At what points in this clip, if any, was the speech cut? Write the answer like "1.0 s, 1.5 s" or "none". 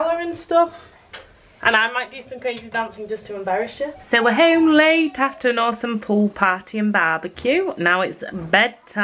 4.0 s

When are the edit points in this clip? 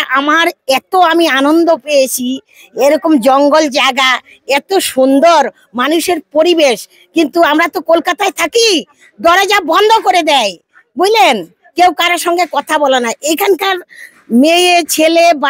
none

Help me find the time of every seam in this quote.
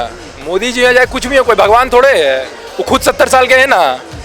none

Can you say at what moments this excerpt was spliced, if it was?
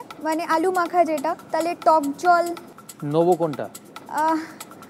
none

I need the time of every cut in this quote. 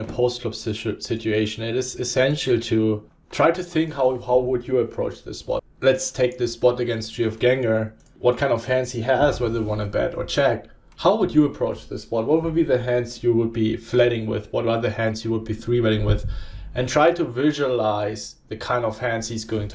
3.2 s, 5.7 s, 8.1 s

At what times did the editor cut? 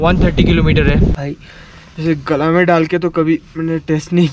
1.2 s

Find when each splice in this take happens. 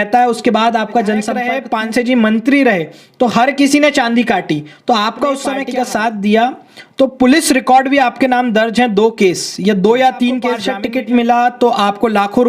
1.6 s, 5.6 s, 10.7 s

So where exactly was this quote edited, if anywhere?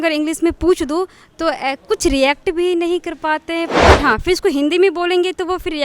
3.8 s

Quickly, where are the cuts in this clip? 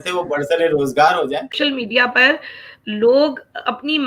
1.5 s

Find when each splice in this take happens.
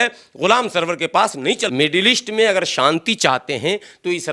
1.7 s

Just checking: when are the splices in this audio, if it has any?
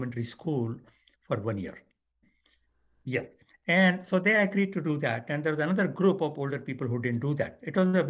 2.3 s

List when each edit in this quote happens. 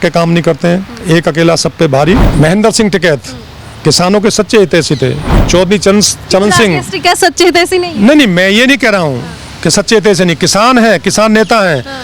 2.3 s

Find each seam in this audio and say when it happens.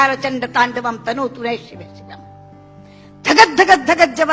1.8 s, 3.0 s

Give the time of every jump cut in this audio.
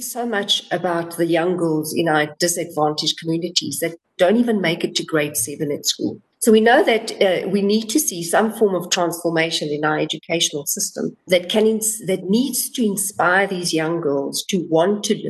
6.3 s, 11.2 s

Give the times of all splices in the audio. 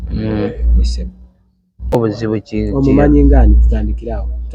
1.9 s

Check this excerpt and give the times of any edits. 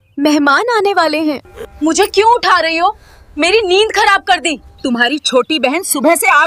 1.5 s, 4.7 s

